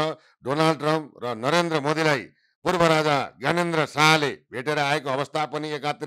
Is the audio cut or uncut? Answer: uncut